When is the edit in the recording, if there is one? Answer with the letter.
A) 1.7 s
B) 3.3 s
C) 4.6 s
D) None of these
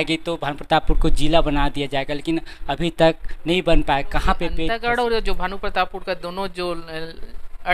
C